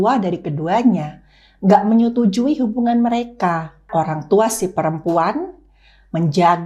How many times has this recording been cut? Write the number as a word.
one